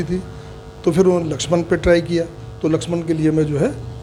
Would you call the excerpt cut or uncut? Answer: uncut